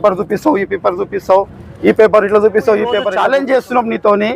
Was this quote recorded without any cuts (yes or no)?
no